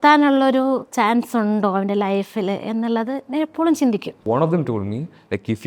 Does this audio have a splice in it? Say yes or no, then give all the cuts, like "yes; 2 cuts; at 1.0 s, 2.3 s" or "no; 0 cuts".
yes; 1 cut; at 4.2 s